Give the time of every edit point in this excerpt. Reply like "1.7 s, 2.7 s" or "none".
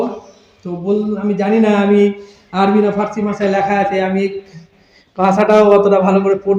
none